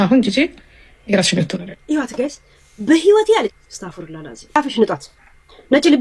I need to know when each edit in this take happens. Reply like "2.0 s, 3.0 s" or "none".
4.6 s